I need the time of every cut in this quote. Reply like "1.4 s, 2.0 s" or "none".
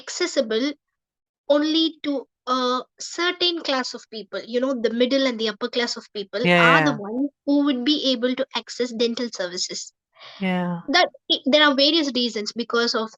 none